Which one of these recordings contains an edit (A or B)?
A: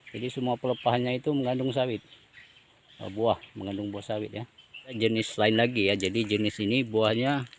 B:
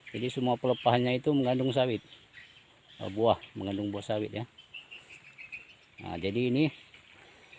A